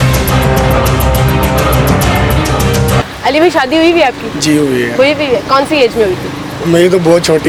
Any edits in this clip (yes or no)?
no